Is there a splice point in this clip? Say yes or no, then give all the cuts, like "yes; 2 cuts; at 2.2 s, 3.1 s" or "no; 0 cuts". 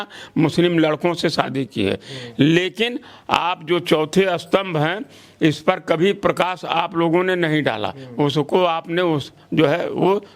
no; 0 cuts